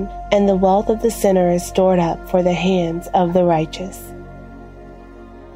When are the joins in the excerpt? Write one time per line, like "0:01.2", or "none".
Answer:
0:04.5